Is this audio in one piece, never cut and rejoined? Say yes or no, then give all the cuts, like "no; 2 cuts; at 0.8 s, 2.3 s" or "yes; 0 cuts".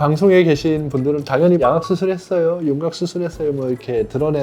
no; 1 cut; at 1.6 s